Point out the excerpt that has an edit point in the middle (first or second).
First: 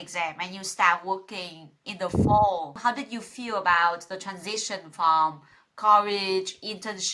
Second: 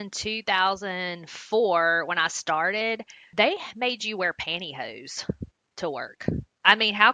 first